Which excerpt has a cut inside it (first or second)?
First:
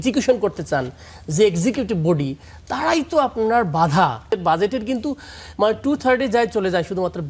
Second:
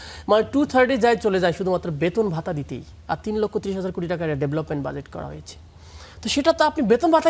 first